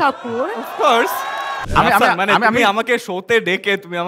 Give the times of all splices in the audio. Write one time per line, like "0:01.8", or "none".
0:01.6